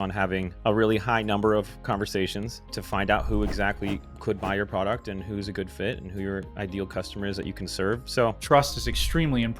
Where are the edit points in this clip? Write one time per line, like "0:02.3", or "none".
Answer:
0:08.4